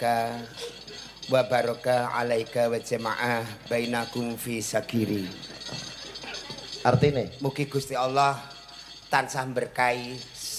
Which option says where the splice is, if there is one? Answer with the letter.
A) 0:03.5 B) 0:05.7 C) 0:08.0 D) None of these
D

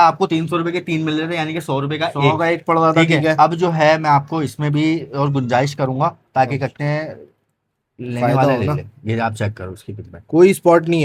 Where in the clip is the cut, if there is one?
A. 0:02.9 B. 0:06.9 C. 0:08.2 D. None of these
D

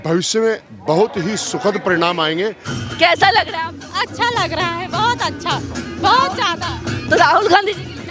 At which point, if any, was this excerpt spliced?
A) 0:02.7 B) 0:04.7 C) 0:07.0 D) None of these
A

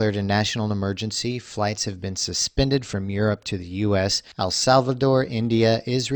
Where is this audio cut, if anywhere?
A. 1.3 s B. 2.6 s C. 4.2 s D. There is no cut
C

